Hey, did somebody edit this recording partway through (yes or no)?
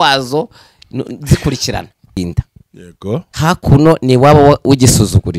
yes